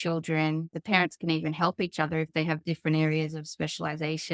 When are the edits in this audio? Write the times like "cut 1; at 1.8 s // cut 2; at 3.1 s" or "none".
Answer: none